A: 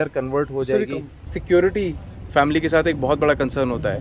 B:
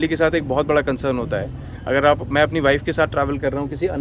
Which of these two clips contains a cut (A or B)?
A